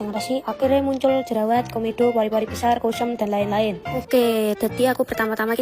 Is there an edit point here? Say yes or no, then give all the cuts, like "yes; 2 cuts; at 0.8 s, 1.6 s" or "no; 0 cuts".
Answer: yes; 1 cut; at 4.0 s